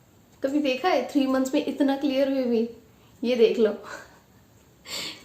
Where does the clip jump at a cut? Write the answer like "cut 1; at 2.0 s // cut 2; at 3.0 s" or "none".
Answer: none

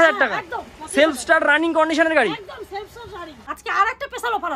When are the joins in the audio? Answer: cut 1; at 3.4 s

